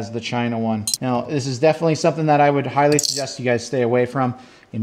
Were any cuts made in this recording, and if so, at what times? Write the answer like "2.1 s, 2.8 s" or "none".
0.9 s